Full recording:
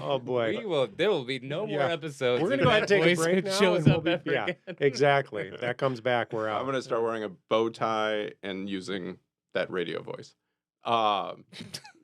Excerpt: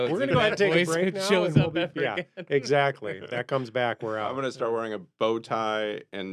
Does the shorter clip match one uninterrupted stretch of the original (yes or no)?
yes